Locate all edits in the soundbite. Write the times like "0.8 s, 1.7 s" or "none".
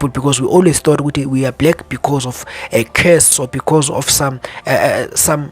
3.4 s

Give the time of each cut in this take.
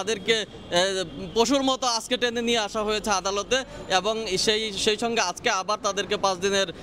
none

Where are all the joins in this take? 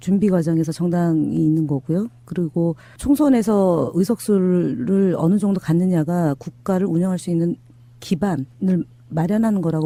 none

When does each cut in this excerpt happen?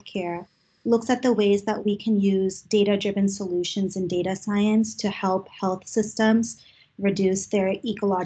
none

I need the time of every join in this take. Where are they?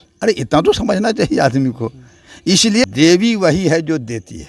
2.8 s

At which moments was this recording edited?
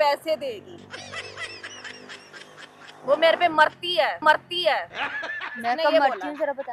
none

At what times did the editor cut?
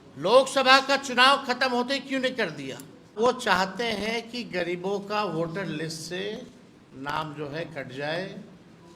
3.1 s

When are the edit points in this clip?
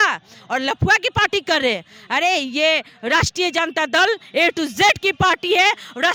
none

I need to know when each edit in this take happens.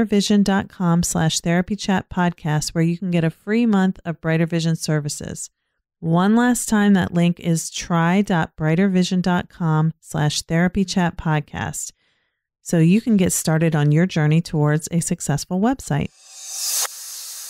16.4 s

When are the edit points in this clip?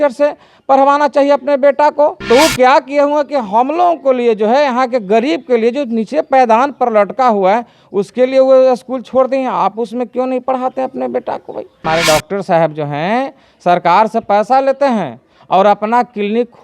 2.2 s, 11.8 s

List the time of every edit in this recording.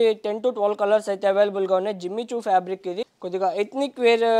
3.1 s

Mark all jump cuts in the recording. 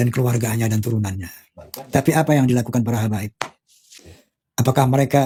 none

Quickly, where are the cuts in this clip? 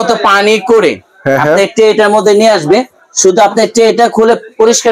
none

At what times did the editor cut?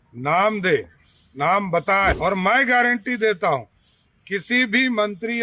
2.2 s

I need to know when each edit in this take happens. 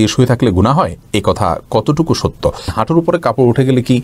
2.8 s

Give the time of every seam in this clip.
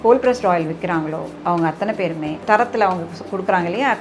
2.4 s

